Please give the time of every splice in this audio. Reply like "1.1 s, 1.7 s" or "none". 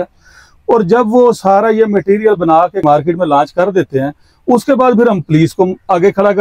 2.8 s